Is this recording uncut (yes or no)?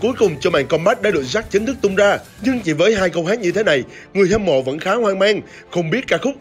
yes